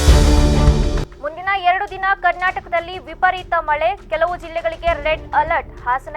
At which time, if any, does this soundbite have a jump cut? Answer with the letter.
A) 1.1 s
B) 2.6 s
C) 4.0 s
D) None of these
A